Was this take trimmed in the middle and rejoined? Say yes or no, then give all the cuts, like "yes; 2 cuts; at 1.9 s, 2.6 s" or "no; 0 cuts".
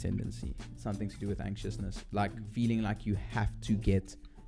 no; 0 cuts